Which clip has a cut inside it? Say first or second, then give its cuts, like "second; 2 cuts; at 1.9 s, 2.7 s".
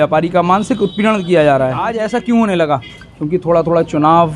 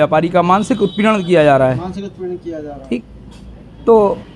first; 1 cut; at 1.9 s